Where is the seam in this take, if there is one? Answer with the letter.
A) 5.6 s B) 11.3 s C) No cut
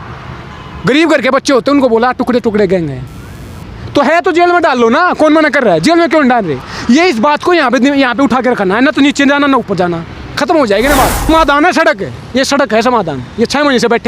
B